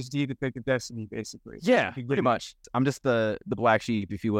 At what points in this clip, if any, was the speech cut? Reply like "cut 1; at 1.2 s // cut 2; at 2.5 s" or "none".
cut 1; at 2.6 s